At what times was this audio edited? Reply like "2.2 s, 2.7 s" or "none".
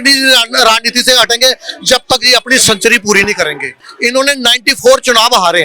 3.9 s